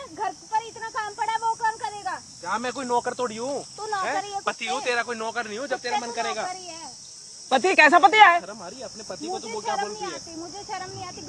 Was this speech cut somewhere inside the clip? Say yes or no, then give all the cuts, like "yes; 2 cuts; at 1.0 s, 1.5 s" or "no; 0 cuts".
no; 0 cuts